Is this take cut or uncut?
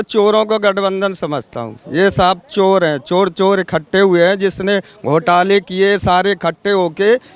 uncut